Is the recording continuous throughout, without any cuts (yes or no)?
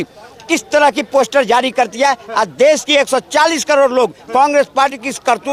yes